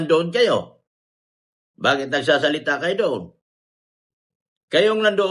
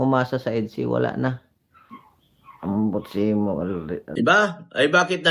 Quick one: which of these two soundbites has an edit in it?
second; 1 cut; at 4.0 s

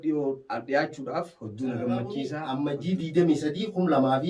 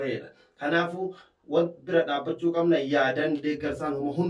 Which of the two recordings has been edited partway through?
first; 1 cut; at 2.4 s

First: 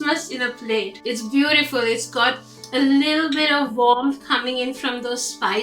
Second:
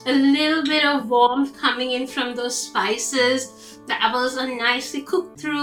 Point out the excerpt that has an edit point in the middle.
first; 1 cut; at 1.0 s

